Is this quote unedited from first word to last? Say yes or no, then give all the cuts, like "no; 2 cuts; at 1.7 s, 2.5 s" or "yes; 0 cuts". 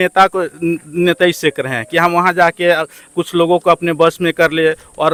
yes; 0 cuts